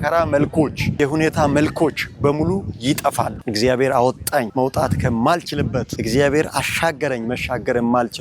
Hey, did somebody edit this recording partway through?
yes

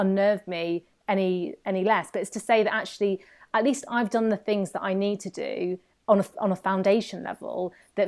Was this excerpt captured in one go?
yes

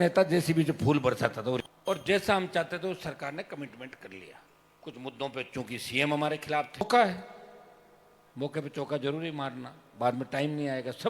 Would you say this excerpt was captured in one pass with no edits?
no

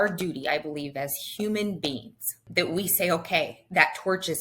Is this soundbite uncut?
no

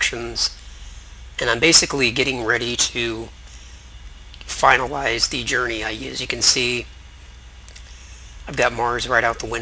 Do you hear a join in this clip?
no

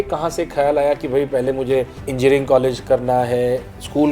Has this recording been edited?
yes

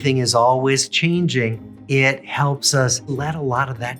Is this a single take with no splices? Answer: no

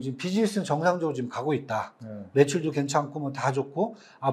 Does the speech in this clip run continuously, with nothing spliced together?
yes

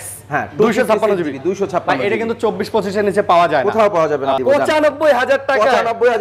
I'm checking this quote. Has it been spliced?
yes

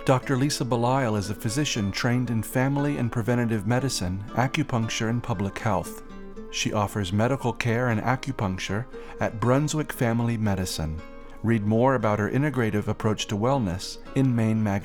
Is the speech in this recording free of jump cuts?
yes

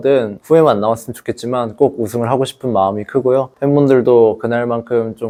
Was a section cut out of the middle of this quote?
no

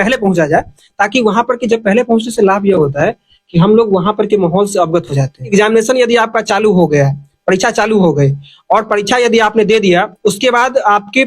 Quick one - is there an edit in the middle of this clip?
yes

